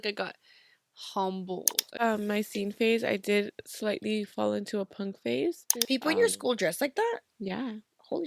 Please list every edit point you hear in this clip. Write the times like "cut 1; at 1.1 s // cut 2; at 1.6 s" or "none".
cut 1; at 2.0 s // cut 2; at 5.7 s